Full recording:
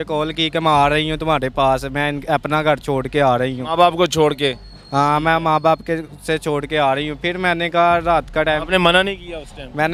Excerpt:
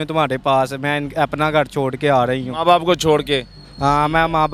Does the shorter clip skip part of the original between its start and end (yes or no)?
no